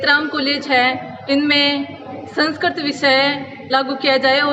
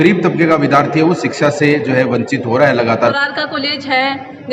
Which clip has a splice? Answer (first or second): second